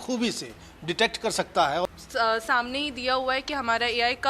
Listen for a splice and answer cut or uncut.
cut